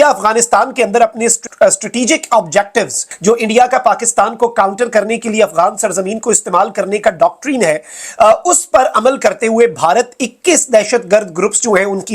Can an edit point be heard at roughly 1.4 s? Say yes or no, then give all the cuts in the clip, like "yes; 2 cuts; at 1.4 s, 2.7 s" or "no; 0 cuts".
yes; 2 cuts; at 1.4 s, 3.0 s